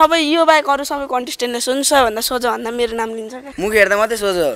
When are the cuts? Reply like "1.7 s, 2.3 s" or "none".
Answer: 3.4 s